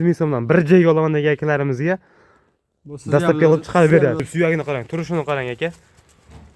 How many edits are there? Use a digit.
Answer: 1